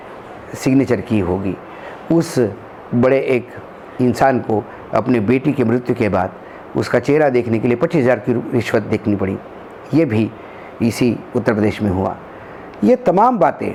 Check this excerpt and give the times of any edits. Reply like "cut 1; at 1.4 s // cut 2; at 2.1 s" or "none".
none